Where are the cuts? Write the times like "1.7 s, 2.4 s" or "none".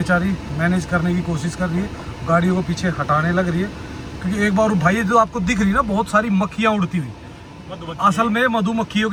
none